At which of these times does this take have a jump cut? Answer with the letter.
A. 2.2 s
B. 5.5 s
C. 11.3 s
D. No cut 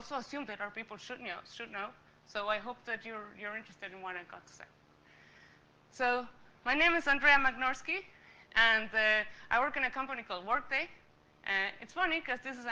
D